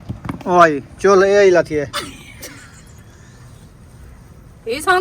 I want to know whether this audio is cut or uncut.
uncut